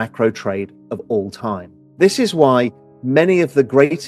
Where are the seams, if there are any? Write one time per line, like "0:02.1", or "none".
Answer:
0:01.8